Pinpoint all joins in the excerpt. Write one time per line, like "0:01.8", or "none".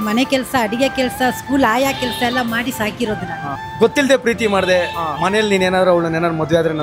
0:03.5